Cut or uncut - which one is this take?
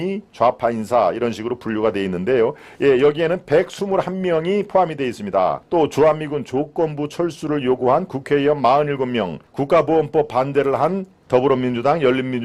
cut